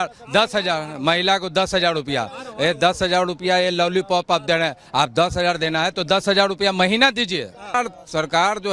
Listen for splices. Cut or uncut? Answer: cut